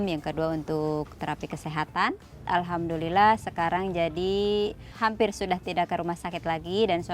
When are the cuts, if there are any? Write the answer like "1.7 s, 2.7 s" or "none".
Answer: 2.4 s, 4.9 s